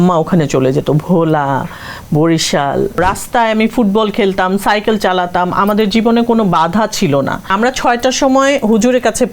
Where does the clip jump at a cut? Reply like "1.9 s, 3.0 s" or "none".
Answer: 3.0 s, 7.4 s

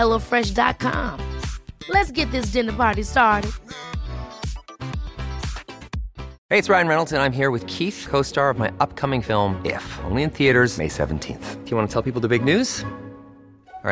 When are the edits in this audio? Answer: 6.3 s

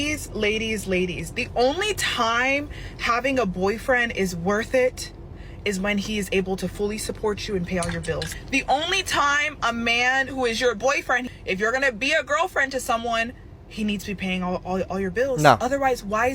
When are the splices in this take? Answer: 8.3 s, 11.3 s

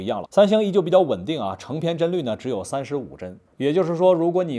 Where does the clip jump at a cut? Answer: 3.4 s

